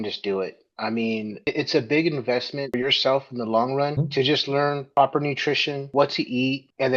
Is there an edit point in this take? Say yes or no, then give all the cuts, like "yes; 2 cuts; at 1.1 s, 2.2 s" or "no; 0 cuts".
yes; 2 cuts; at 1.4 s, 4.8 s